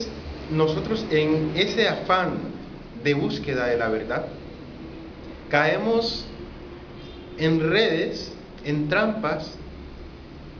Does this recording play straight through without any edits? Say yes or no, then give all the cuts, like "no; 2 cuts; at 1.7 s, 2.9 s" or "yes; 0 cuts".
no; 1 cut; at 5.1 s